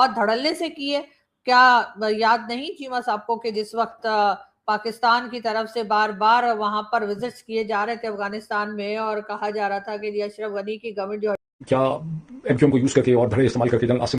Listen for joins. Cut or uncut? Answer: cut